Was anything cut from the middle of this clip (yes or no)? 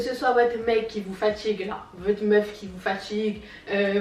no